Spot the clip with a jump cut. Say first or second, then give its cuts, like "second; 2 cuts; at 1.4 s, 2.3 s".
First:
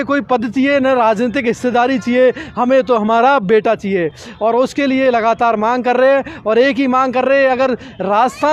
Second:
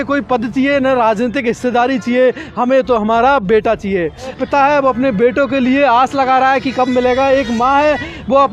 second; 1 cut; at 4.4 s